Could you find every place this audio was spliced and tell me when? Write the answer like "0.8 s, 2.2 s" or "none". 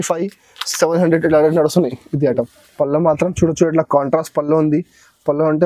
2.6 s